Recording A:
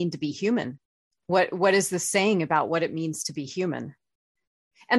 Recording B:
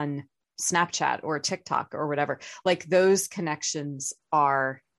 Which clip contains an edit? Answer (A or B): A